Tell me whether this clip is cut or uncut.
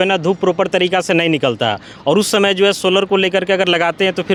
uncut